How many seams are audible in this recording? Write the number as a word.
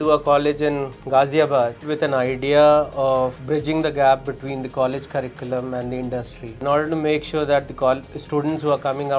three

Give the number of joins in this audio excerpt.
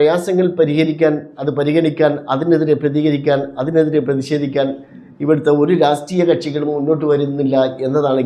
zero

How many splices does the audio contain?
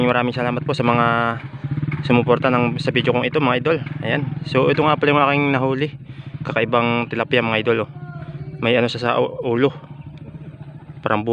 zero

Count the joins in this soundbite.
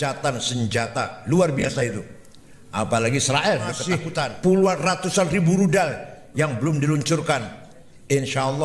one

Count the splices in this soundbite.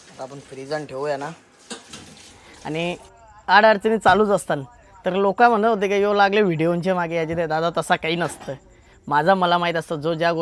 one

